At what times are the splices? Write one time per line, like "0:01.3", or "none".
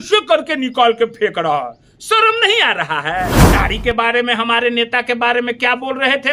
0:03.4